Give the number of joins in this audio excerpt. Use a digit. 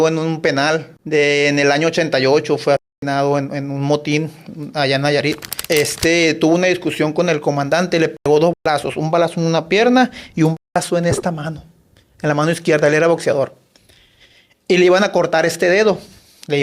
2